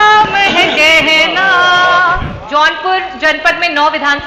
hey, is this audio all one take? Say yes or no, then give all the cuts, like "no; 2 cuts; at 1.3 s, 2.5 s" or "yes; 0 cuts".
no; 1 cut; at 2.3 s